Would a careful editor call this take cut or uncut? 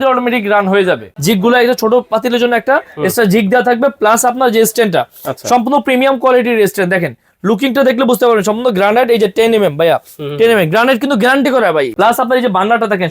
cut